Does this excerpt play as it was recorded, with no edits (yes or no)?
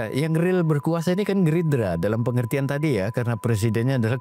yes